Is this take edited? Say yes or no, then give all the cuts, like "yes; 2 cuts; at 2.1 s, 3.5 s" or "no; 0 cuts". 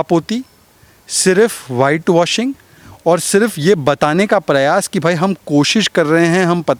no; 0 cuts